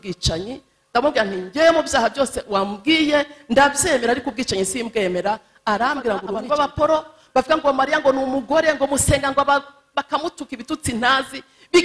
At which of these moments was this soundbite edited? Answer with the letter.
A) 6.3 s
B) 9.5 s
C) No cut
A